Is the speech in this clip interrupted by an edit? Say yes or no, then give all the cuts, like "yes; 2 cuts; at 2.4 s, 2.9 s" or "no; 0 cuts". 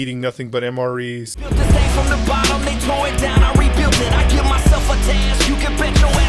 yes; 1 cut; at 1.4 s